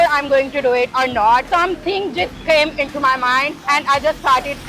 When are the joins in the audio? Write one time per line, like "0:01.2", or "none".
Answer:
0:01.4
0:03.6